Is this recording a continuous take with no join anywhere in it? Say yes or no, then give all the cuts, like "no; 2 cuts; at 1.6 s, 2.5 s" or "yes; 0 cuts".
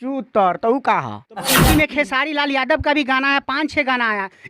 no; 1 cut; at 1.6 s